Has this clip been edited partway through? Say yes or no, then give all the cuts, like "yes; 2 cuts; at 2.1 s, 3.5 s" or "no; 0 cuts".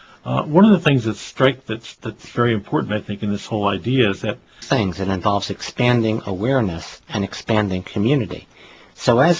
no; 0 cuts